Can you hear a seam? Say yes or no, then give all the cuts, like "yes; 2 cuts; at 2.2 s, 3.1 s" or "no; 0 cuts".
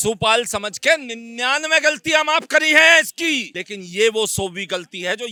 no; 0 cuts